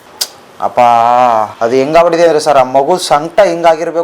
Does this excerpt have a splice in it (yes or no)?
yes